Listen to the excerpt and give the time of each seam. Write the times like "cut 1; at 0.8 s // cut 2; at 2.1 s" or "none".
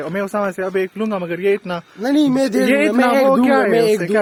none